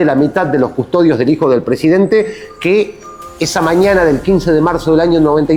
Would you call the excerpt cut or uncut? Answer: uncut